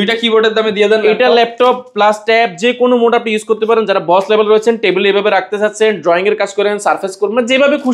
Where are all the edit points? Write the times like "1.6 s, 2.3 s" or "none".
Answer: none